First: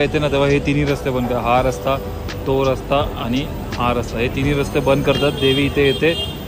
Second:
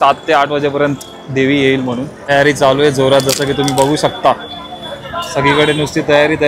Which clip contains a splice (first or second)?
second